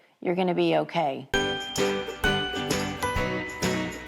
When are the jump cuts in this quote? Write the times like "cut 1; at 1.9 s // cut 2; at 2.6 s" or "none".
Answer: cut 1; at 1.2 s